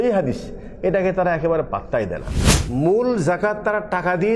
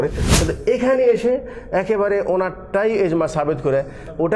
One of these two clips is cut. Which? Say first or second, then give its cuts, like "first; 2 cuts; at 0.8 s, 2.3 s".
first; 1 cut; at 2.4 s